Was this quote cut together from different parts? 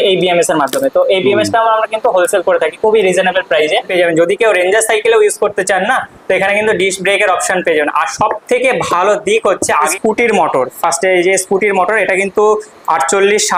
yes; 2 cuts; at 3.9 s, 9.8 s

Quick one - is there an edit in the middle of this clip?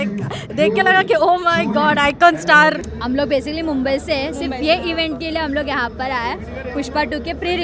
yes; 1 cut; at 2.9 s

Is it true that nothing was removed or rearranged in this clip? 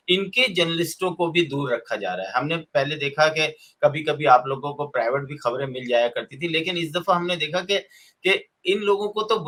yes; 0 cuts

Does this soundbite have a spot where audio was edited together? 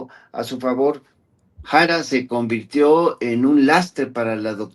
yes; 1 cut; at 1.1 s

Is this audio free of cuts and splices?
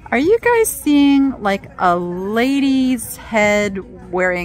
yes; 0 cuts

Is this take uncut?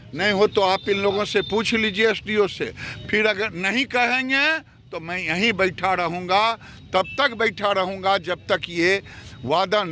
yes; 0 cuts

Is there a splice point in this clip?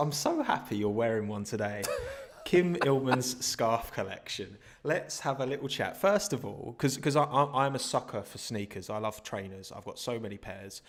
no; 0 cuts

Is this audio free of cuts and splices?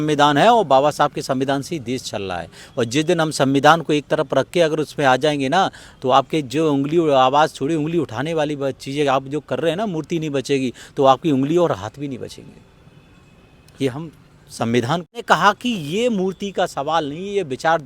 no; 1 cut; at 15.1 s

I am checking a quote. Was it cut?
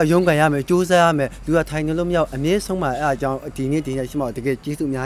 no; 0 cuts

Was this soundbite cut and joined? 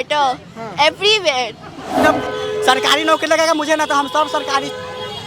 yes; 1 cut; at 2.0 s

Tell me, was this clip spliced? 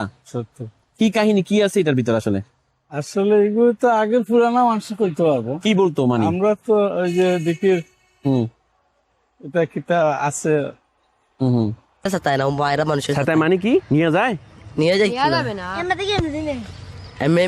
yes; 1 cut; at 12.0 s

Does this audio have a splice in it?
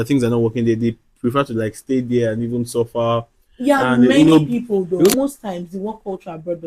yes; 1 cut; at 5.1 s

